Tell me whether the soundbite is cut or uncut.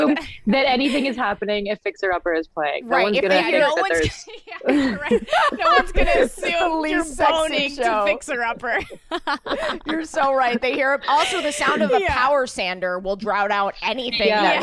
uncut